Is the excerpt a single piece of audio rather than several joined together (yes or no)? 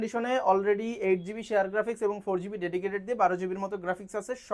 yes